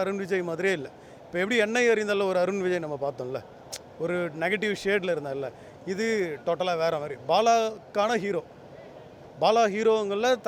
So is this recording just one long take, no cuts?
yes; 0 cuts

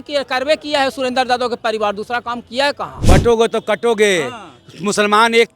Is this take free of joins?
no; 1 cut; at 2.9 s

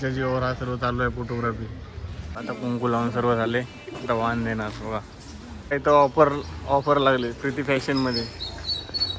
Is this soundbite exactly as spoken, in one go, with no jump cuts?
no; 2 cuts; at 2.3 s, 5.7 s

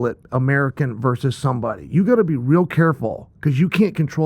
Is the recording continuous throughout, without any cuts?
yes; 0 cuts

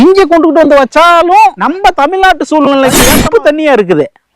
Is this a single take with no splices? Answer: no; 2 cuts; at 1.7 s, 3.1 s

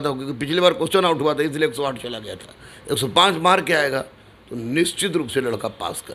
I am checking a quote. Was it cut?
no; 0 cuts

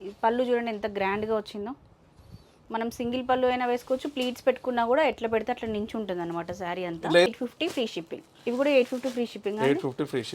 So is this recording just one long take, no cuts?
no; 1 cut; at 7.3 s

